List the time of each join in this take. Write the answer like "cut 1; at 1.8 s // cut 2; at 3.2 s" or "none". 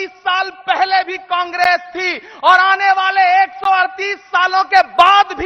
none